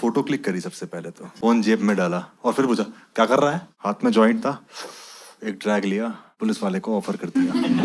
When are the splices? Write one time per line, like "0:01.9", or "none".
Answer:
0:01.2
0:03.7
0:06.2